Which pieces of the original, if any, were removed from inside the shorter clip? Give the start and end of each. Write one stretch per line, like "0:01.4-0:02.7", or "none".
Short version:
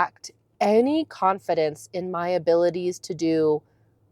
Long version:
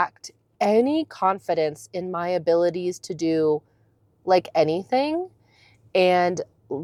none